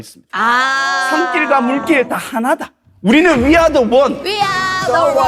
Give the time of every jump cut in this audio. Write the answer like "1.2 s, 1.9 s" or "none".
none